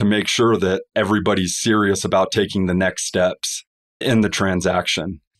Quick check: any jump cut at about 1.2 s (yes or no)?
no